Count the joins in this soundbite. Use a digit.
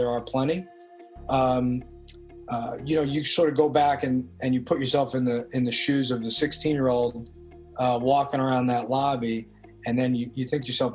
0